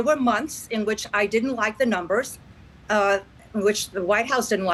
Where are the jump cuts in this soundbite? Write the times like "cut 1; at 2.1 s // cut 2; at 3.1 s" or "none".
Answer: none